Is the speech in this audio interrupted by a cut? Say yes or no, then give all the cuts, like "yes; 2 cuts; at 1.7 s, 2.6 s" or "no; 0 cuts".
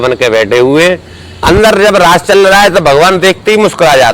yes; 1 cut; at 1.4 s